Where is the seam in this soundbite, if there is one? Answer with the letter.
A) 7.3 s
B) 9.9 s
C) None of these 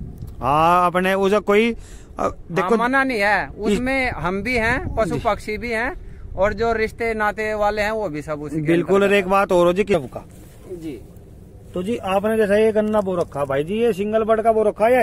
B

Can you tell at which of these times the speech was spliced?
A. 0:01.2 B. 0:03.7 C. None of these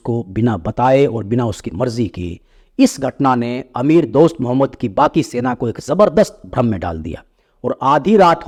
C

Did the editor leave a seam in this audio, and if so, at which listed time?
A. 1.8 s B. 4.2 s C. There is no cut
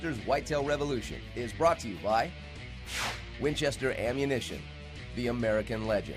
C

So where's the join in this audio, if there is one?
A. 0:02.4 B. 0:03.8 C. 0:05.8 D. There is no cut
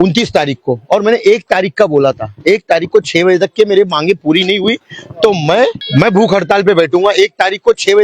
C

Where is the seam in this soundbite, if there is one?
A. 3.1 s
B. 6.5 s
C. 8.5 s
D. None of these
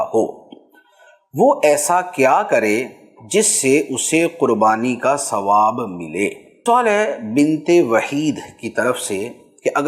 B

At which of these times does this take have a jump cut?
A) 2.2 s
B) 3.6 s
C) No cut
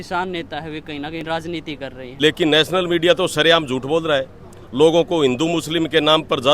A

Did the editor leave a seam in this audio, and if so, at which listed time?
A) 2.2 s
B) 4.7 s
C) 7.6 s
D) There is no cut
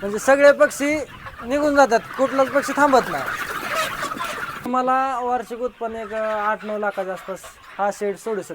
B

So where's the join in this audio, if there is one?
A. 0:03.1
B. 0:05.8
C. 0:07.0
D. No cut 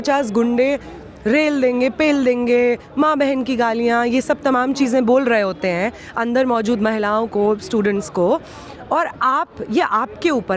D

